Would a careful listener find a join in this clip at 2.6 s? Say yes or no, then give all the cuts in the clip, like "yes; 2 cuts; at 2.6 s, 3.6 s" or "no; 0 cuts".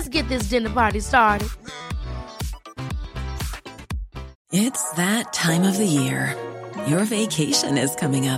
no; 1 cut; at 4.4 s